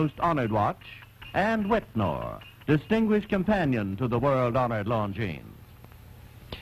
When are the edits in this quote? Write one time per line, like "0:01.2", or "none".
0:01.7